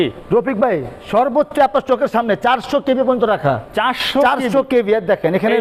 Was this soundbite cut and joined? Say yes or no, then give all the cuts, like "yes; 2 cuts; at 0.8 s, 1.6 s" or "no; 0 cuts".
no; 0 cuts